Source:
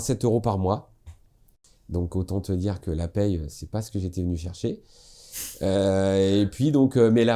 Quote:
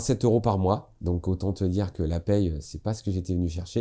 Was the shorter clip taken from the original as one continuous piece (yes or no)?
no